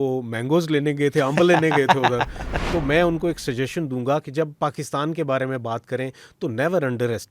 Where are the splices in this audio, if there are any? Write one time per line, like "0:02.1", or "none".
0:02.4